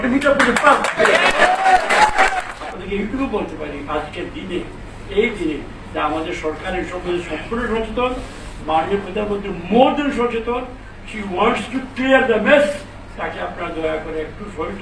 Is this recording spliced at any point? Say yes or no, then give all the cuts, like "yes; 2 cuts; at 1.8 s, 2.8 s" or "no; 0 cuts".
yes; 1 cut; at 2.5 s